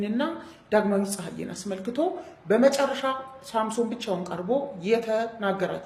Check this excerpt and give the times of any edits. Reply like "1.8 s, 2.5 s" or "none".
none